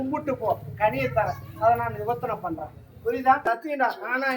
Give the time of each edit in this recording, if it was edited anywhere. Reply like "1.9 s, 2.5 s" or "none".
3.4 s

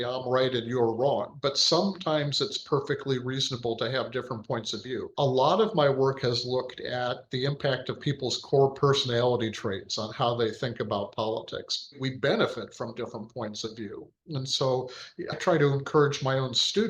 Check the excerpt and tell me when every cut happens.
5.1 s, 12.0 s, 15.3 s

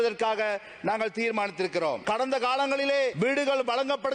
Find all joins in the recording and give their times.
2.0 s, 3.1 s

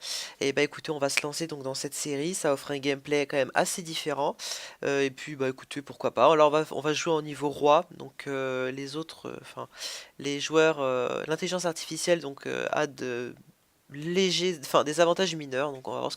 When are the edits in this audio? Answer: 13.1 s

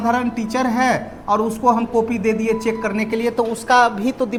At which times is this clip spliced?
none

